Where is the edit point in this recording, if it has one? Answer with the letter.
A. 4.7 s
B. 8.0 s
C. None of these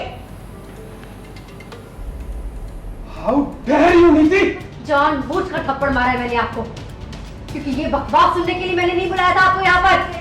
A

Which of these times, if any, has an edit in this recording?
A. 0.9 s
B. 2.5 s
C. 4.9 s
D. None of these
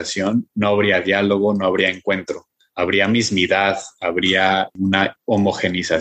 C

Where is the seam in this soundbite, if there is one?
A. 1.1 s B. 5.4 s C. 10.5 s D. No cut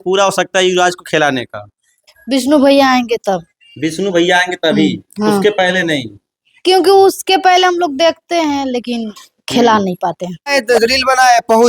C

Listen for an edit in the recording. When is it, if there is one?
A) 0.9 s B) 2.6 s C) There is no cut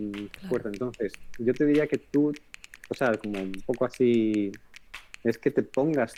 C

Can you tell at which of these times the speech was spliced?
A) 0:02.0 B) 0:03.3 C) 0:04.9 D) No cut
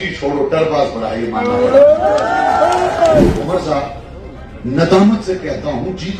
B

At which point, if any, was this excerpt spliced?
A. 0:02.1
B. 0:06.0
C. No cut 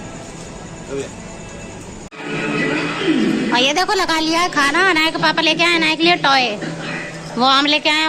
A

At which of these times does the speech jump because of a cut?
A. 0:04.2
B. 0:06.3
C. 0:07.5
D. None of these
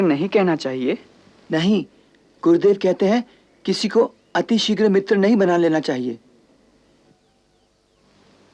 D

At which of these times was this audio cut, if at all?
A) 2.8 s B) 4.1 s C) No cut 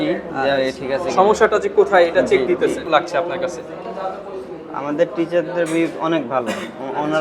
A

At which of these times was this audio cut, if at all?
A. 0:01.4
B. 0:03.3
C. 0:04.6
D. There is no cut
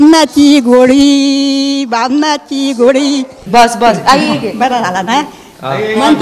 B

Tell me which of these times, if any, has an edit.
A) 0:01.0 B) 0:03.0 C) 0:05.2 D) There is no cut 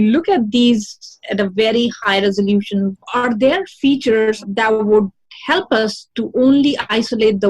B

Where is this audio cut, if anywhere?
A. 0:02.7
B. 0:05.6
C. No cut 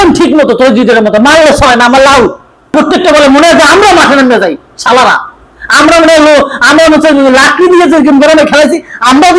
A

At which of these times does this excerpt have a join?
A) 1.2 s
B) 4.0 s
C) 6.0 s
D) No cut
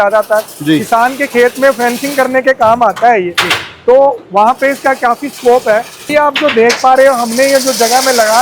C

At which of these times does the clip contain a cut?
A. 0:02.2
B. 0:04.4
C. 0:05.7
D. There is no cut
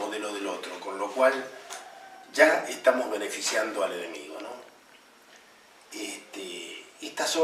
A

